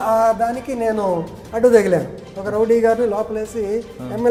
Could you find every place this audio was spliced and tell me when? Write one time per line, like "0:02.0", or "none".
none